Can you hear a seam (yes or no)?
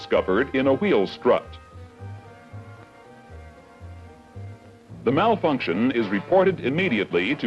no